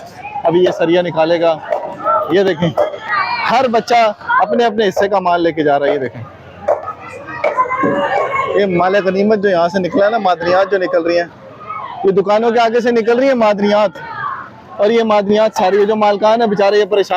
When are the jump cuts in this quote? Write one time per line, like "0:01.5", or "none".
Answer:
none